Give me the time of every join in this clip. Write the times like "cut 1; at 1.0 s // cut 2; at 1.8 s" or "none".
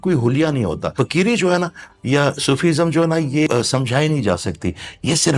cut 1; at 0.9 s // cut 2; at 3.5 s